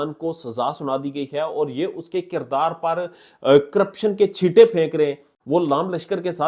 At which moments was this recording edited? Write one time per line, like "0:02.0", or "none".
0:05.3